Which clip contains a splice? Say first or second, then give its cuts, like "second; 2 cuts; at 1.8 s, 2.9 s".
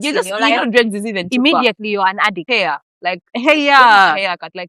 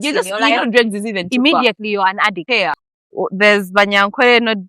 second; 1 cut; at 2.9 s